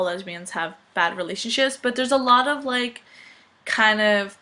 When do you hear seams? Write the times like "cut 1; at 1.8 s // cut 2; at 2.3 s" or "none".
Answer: cut 1; at 2.4 s